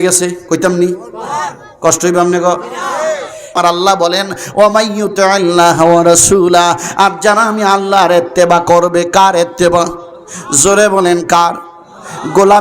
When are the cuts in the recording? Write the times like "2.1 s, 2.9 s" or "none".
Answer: 3.5 s